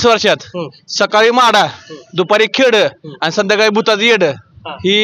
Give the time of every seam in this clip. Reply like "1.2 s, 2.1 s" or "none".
none